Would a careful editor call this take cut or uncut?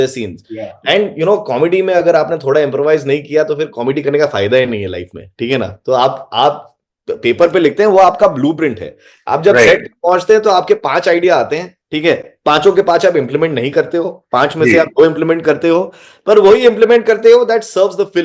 uncut